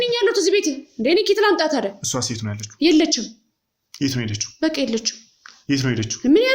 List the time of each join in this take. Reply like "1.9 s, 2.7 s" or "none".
none